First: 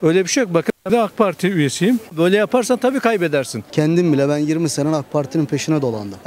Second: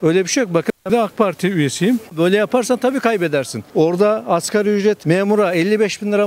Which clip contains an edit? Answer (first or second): first